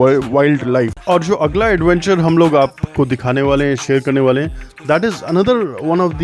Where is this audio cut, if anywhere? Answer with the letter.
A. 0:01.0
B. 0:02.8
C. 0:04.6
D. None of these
A